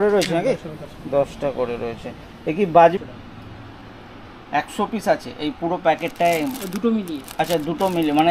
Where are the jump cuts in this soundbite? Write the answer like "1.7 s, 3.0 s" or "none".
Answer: 3.0 s